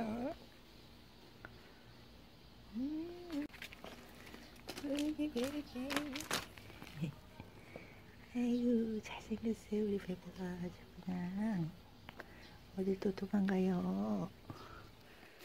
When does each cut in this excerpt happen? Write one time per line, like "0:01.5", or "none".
0:03.5